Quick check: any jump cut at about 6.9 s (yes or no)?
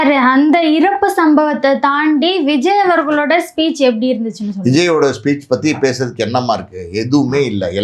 no